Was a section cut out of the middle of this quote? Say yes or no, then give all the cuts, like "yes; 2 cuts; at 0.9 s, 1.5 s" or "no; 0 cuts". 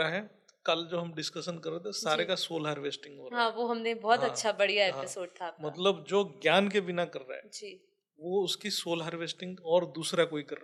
no; 0 cuts